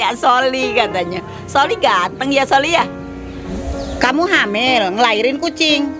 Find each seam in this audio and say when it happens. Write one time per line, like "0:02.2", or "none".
0:03.6

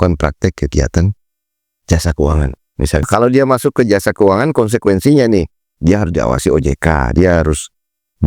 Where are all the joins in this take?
0:03.1

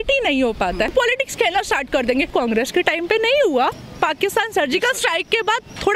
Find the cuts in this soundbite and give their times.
0:00.9
0:02.3
0:03.8

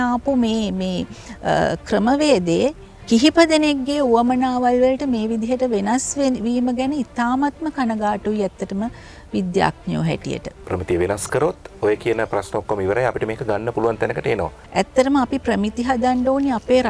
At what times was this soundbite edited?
0:10.5
0:14.6

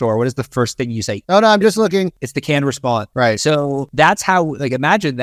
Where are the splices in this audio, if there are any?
0:01.1
0:02.6
0:03.9

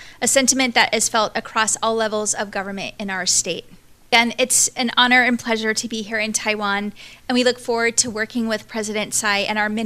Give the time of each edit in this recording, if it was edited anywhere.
0:04.1

